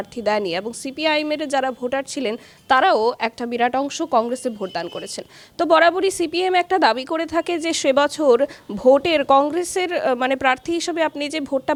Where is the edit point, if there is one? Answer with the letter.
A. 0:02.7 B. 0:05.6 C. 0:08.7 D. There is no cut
D